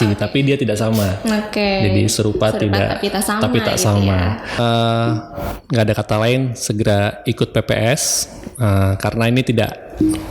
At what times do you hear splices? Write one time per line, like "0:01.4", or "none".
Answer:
0:04.5